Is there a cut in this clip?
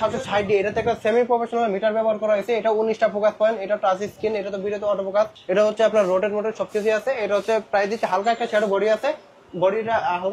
no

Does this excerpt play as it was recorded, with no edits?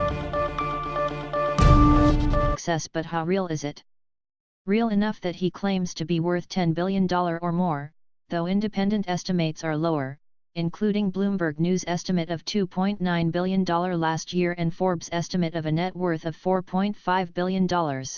yes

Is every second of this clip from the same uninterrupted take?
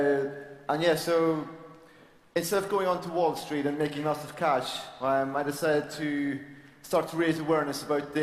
no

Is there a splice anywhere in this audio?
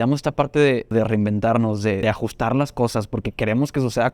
yes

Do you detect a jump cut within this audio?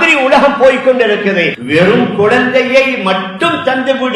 yes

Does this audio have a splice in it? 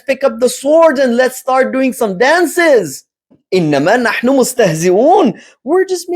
yes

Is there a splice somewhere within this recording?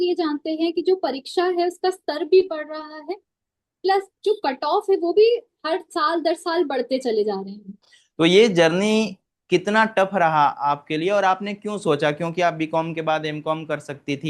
yes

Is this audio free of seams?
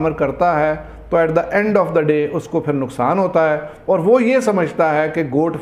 yes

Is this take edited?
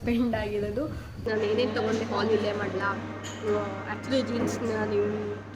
yes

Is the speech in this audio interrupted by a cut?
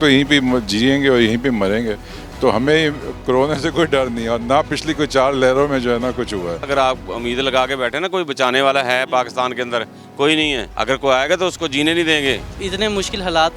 yes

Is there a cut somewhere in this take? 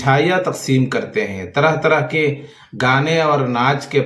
no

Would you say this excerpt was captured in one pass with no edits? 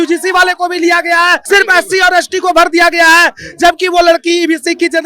no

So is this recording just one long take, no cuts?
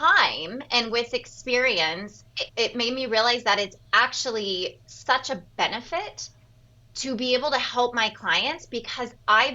no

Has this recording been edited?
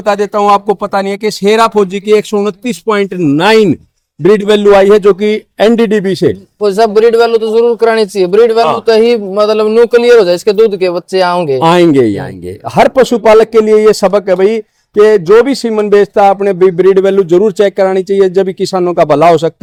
no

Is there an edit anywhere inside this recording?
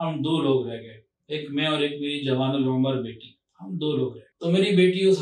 yes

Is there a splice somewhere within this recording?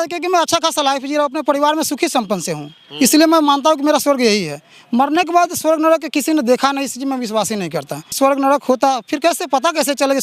no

